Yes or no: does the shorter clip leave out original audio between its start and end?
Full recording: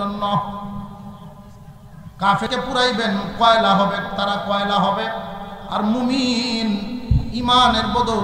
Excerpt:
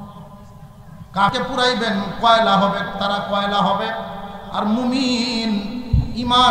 yes